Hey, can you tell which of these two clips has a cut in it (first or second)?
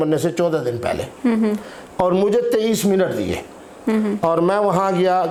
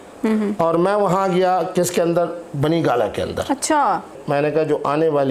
second